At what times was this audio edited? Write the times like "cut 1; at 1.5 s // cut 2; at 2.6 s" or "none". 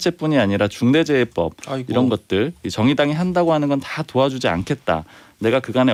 none

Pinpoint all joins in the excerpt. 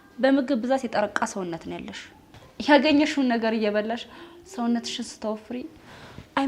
none

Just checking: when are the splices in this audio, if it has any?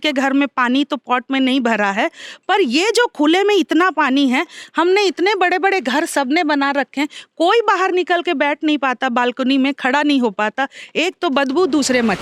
none

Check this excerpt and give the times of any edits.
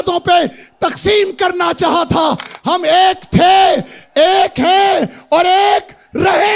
none

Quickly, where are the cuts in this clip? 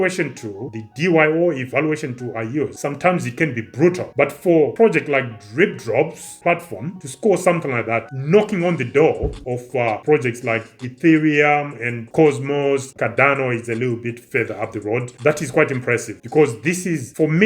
cut 1; at 12.9 s

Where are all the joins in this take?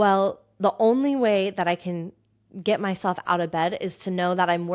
none

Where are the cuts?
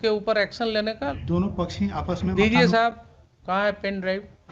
cut 1; at 1.1 s

